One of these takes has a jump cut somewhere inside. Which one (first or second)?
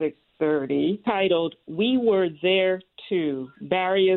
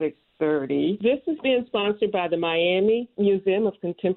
first